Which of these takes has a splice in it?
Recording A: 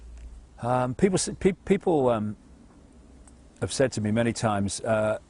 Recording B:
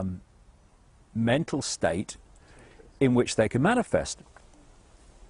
B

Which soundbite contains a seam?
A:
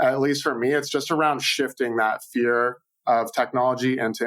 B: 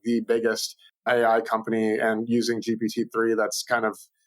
B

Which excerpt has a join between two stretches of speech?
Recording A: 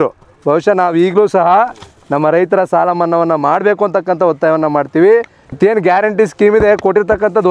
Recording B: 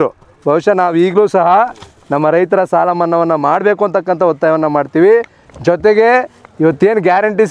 A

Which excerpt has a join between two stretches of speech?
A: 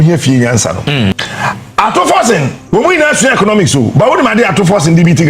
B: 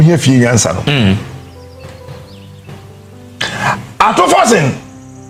A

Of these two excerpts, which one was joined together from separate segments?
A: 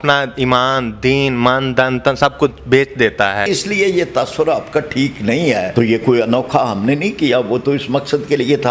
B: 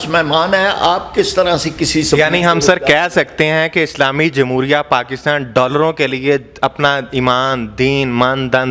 A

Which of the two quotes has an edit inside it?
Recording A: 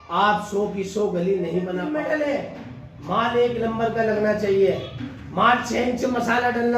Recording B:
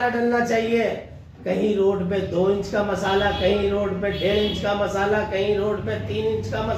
A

